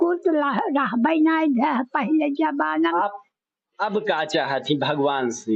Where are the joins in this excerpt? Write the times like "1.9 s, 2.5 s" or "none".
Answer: 2.9 s